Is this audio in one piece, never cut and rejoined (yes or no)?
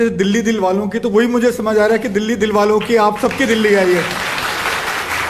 yes